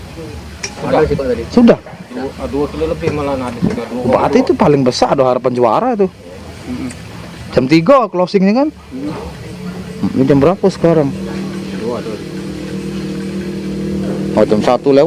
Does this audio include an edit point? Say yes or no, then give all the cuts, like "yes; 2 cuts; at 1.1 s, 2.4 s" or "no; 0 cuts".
no; 0 cuts